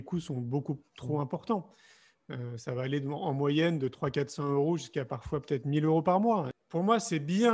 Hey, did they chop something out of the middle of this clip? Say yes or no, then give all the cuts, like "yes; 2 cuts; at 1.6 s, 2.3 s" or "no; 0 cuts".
yes; 1 cut; at 6.6 s